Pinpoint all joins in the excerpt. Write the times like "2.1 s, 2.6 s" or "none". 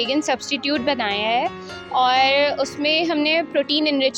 none